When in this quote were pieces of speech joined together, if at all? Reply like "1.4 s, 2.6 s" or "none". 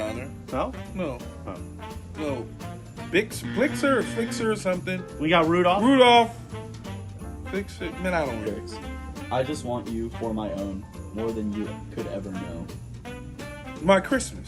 8.5 s